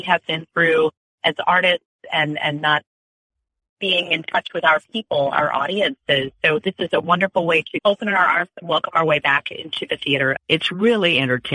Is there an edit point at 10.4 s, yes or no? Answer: yes